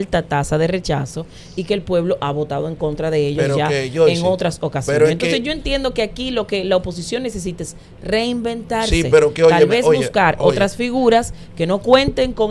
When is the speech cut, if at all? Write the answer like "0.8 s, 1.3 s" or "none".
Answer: none